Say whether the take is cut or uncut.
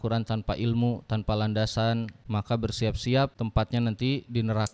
cut